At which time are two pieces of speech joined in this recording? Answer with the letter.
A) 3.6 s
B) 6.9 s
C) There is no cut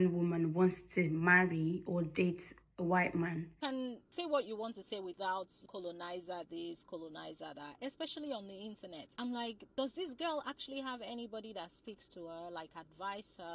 A